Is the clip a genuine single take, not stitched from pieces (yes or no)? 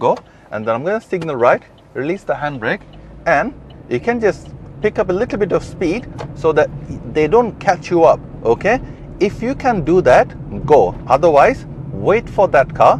yes